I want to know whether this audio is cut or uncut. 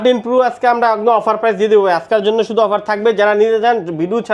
uncut